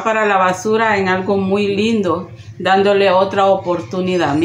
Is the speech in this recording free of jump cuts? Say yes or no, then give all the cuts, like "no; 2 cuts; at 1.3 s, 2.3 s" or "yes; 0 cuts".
yes; 0 cuts